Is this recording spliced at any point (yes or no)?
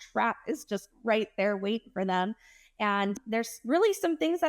yes